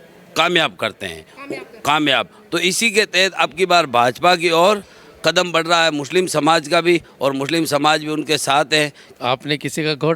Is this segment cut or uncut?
cut